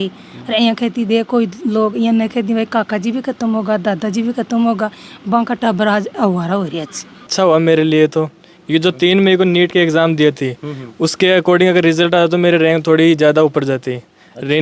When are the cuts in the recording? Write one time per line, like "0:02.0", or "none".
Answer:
0:07.3